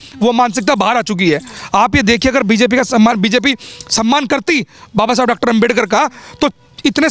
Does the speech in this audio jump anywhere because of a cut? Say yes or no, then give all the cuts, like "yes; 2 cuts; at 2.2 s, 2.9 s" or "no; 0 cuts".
no; 0 cuts